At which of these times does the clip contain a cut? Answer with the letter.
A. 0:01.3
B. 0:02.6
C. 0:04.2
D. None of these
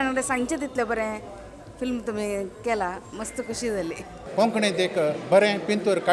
C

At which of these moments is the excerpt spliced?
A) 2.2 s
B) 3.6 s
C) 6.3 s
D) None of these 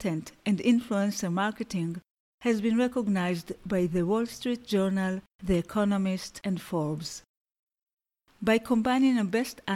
C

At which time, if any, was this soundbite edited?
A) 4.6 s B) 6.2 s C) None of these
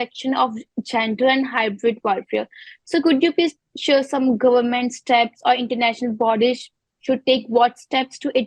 C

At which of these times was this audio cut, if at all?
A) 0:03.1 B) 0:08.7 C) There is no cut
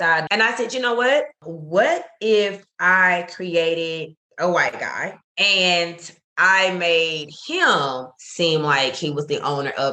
C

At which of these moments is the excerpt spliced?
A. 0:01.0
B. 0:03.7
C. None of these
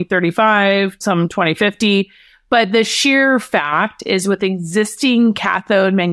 A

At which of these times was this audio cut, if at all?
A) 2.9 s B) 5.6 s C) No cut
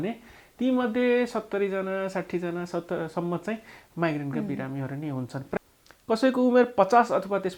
B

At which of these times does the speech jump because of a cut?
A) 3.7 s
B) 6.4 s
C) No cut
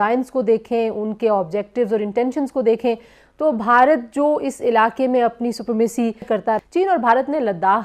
B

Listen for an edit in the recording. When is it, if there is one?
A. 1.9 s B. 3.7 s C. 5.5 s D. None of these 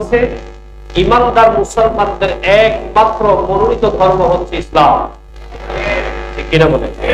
D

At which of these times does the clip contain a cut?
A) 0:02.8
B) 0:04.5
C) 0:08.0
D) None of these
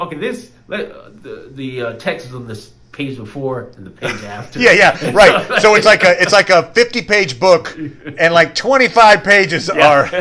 D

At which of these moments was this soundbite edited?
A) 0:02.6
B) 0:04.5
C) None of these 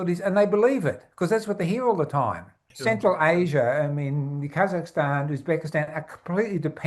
A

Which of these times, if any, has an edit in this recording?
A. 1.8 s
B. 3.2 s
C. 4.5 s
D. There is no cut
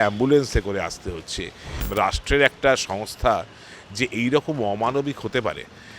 A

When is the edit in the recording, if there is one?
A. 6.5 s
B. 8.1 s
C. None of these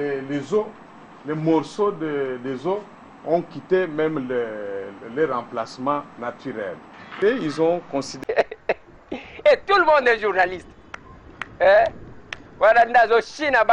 B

